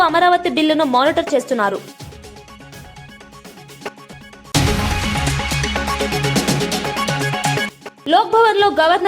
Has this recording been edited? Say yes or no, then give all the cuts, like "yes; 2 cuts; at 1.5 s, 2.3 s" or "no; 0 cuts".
yes; 1 cut; at 4.1 s